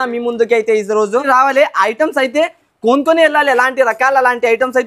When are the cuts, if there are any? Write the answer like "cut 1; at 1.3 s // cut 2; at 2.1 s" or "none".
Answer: cut 1; at 1.2 s